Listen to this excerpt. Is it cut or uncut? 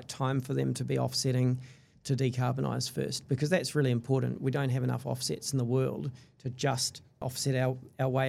cut